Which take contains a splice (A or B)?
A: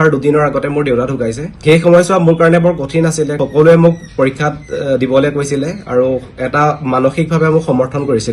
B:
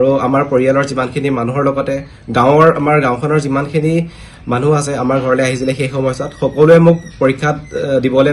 A